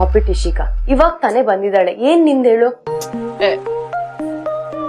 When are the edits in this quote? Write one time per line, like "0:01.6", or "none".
none